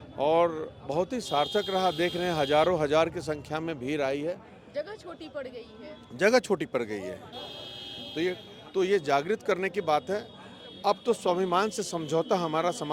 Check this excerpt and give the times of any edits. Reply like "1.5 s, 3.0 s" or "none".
8.5 s